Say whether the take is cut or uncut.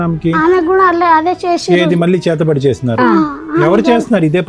uncut